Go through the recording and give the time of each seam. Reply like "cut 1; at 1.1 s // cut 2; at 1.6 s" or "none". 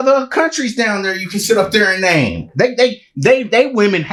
none